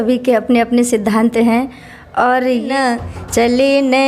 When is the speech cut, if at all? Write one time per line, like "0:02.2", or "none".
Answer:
0:02.7